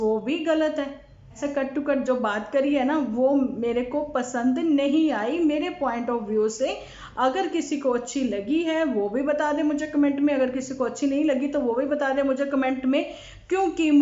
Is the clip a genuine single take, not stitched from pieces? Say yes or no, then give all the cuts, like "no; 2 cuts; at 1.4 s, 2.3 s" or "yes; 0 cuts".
no; 1 cut; at 1.3 s